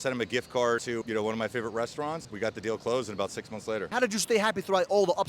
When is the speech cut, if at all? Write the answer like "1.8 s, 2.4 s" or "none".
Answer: 3.9 s

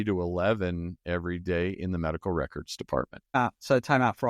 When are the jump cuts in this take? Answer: 3.4 s

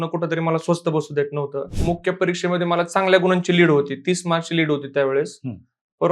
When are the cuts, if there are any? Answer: 1.7 s

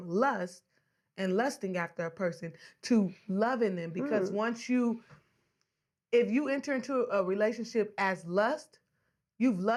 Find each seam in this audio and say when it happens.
none

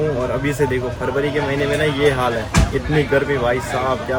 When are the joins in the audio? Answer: none

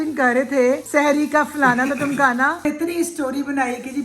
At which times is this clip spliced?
0.8 s, 2.6 s

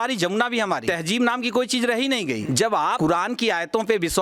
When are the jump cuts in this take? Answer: 0.8 s, 2.7 s

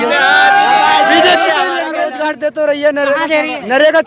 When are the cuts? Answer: 2.2 s

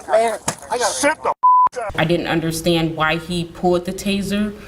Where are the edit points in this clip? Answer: 1.8 s

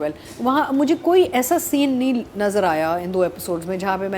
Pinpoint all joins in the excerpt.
none

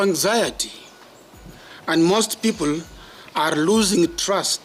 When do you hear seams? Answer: none

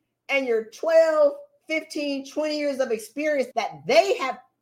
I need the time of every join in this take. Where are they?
3.5 s

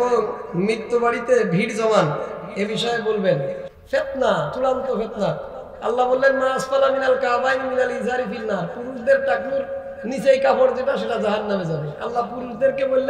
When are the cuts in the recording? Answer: none

